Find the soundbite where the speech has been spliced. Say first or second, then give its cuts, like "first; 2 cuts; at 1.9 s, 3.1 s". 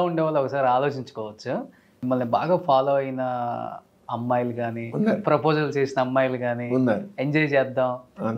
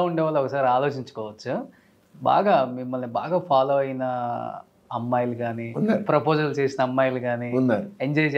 first; 1 cut; at 2.0 s